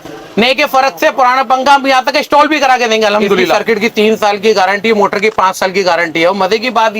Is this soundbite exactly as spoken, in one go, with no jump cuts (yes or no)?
no